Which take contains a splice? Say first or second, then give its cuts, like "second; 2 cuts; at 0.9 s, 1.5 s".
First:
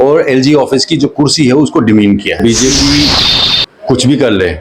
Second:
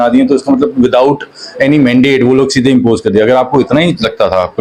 first; 1 cut; at 2.4 s